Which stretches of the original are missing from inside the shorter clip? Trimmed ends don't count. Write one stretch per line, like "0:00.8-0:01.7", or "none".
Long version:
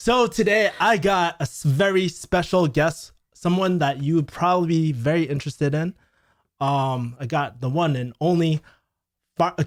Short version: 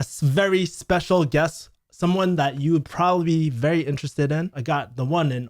0:06.0-0:07.2